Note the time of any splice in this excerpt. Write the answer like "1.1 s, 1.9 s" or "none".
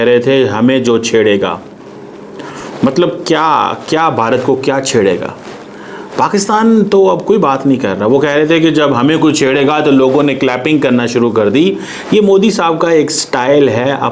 none